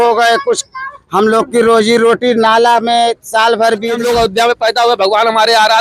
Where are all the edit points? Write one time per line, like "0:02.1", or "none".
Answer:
0:04.0